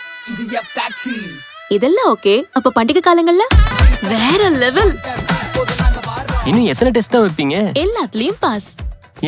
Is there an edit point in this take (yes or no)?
yes